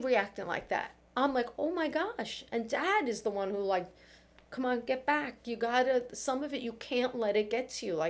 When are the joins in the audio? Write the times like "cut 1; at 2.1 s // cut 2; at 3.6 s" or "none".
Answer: cut 1; at 0.9 s

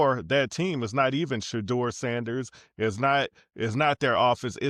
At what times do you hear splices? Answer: none

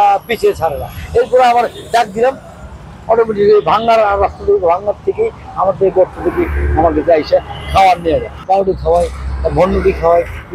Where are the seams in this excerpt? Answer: cut 1; at 8.3 s

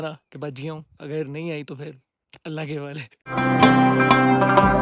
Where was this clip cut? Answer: none

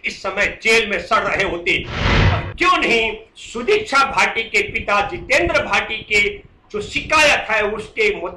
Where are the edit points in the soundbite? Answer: cut 1; at 2.1 s

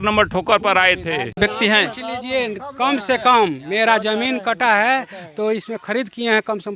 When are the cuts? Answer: cut 1; at 1.3 s

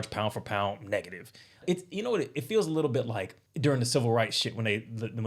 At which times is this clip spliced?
cut 1; at 1.6 s // cut 2; at 3.4 s

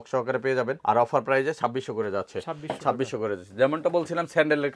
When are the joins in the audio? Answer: none

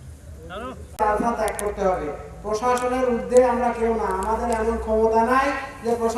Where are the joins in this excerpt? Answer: cut 1; at 1.0 s

